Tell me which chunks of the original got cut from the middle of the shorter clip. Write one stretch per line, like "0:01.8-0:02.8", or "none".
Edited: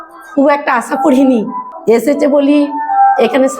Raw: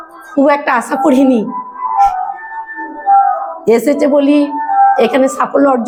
0:01.7-0:03.5